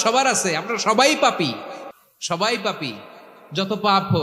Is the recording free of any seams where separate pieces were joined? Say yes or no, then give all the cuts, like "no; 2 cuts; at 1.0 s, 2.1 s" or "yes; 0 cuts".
yes; 0 cuts